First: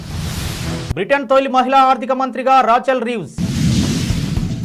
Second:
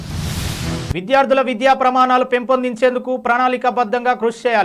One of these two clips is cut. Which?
second; 1 cut; at 0.9 s

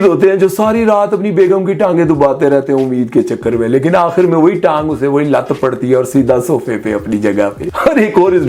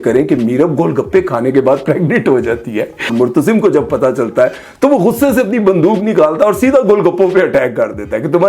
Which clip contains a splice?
second; 1 cut; at 3.1 s

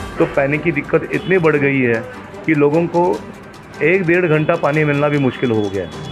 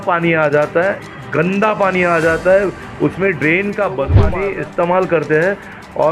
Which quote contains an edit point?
second; 1 cut; at 4.4 s

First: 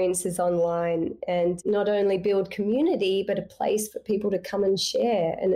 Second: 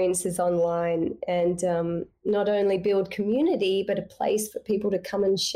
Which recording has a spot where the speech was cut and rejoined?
first; 1 cut; at 1.6 s

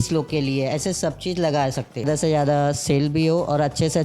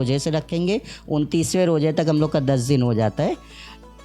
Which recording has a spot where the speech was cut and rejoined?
first; 1 cut; at 2.0 s

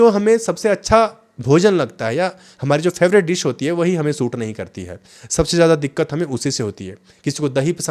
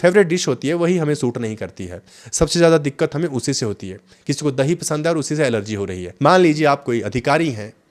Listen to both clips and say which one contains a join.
second; 1 cut; at 6.0 s

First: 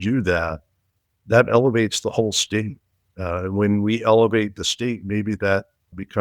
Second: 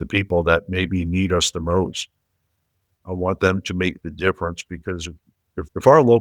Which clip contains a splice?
second; 1 cut; at 2.9 s

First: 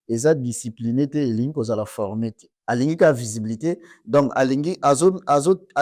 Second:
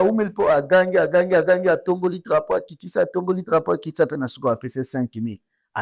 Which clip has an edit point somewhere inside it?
first; 1 cut; at 2.5 s

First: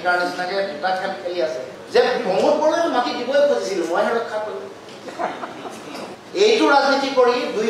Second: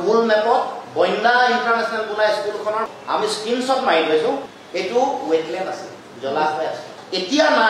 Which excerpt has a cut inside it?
first; 1 cut; at 6.2 s

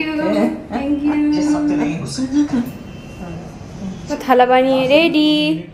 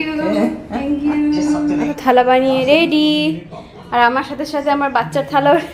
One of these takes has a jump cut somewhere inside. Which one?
second; 1 cut; at 1.9 s

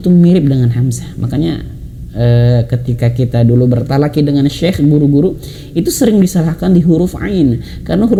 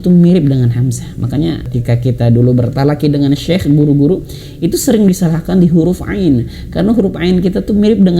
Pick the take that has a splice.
second; 1 cut; at 1.7 s

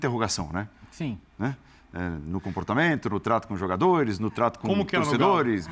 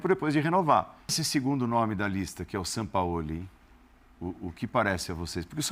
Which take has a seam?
second; 1 cut; at 1.2 s

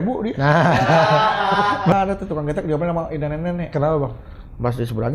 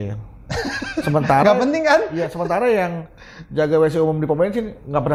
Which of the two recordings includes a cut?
first; 1 cut; at 1.9 s

